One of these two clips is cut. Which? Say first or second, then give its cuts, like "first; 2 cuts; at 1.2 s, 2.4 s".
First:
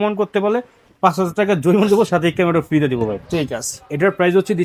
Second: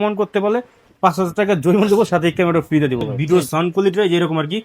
second; 1 cut; at 3.1 s